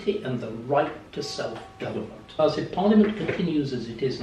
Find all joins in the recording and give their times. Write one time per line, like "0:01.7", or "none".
0:02.3